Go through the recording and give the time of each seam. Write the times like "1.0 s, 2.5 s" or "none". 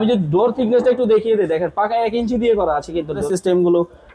3.2 s